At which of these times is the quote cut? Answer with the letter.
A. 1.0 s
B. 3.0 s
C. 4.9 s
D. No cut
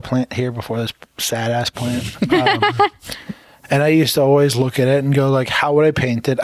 D